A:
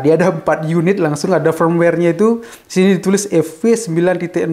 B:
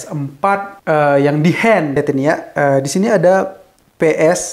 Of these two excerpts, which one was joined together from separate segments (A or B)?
B